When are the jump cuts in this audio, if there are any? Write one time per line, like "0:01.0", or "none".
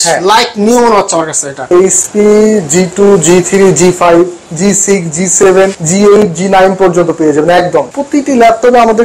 0:01.7
0:05.8
0:08.0